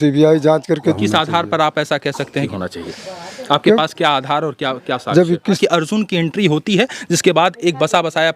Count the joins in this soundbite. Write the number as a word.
three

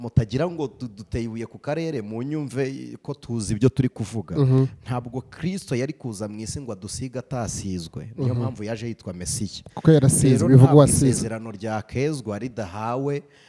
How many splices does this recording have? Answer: zero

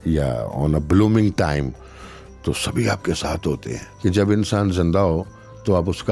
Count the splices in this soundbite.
one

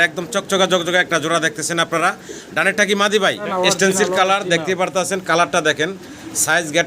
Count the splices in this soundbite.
one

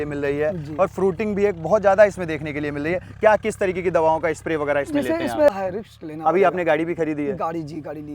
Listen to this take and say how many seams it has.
one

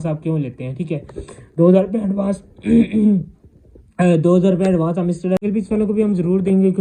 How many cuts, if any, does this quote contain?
one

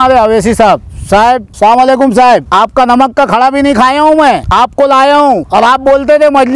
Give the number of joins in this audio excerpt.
four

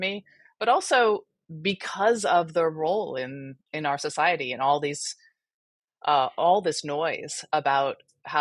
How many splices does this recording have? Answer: zero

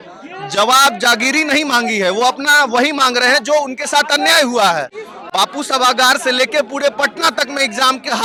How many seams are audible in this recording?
zero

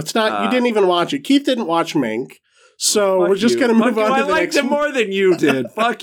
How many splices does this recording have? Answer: zero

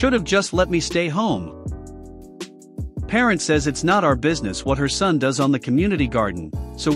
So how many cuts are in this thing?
two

